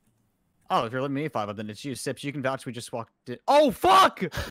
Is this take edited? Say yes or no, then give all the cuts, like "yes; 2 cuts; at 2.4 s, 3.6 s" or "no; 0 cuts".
no; 0 cuts